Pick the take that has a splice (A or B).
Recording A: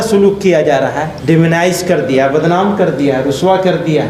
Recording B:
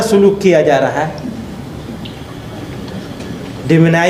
A